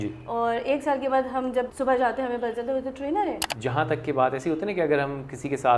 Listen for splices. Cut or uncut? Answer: cut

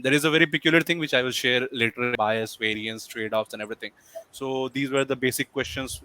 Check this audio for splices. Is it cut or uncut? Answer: cut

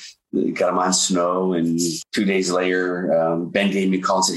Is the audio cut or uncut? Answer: cut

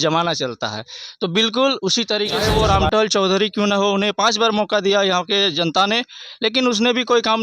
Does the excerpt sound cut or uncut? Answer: cut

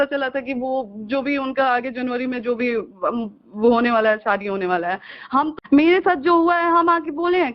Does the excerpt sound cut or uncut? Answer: cut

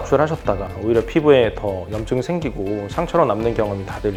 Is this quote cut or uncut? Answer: uncut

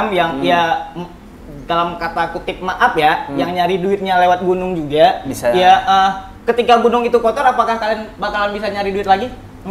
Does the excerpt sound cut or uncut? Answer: uncut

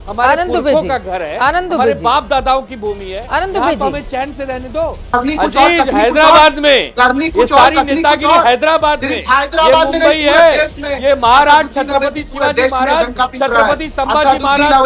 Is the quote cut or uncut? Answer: cut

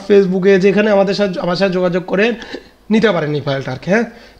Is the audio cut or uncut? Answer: uncut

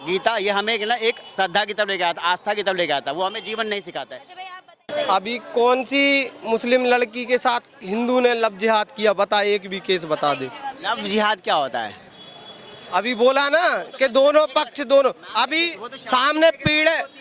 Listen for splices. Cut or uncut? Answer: cut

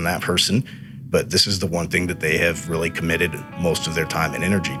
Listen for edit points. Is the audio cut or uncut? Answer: uncut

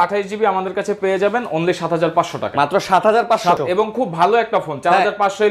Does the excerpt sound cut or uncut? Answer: cut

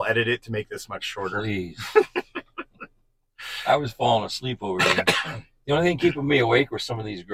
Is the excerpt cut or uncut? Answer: uncut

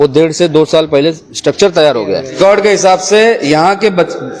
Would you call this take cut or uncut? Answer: cut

